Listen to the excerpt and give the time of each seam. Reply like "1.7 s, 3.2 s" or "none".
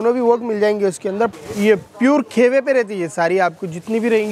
1.4 s